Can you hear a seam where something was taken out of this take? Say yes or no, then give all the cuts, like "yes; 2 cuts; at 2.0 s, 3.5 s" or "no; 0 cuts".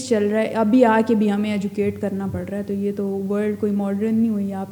no; 0 cuts